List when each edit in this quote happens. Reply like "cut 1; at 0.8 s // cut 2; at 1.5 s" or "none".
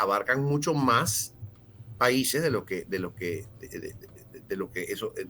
none